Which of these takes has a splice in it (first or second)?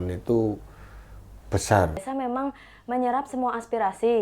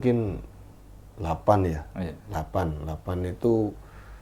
first